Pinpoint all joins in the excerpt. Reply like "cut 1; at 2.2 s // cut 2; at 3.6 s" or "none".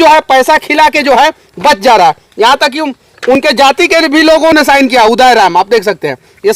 none